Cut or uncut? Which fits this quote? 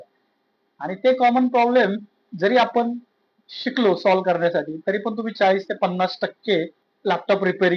uncut